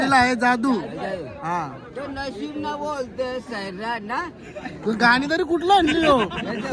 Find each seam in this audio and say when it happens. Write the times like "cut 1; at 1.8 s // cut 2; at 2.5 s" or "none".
none

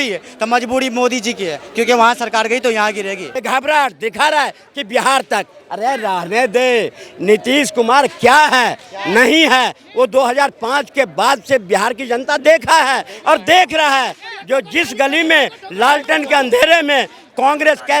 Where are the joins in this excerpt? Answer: cut 1; at 3.3 s

